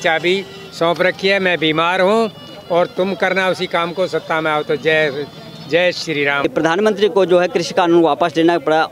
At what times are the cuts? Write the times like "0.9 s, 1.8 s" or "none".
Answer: none